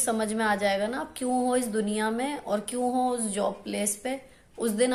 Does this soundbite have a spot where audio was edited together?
no; 0 cuts

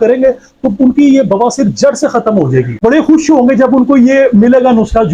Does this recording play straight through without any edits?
no; 1 cut; at 2.8 s

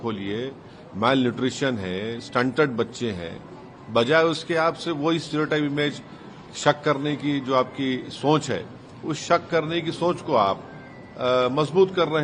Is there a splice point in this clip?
no; 0 cuts

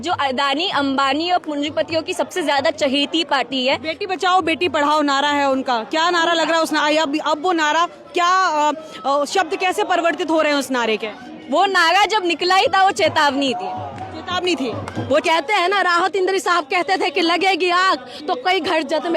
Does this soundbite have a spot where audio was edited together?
yes; 1 cut; at 15.2 s

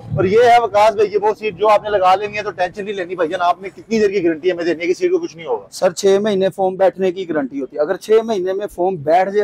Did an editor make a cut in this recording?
no; 0 cuts

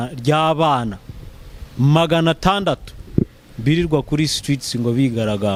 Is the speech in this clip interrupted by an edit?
no; 0 cuts

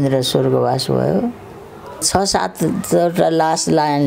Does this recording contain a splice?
yes; 1 cut; at 2.1 s

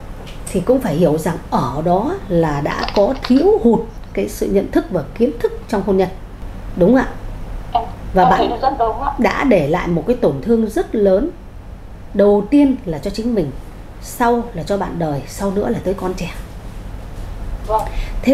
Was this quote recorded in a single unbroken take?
yes; 0 cuts

